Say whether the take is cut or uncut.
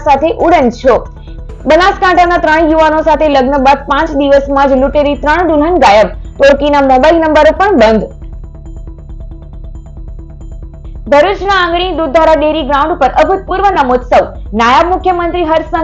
uncut